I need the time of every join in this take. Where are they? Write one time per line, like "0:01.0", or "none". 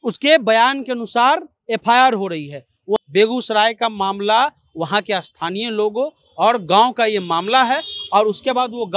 0:03.0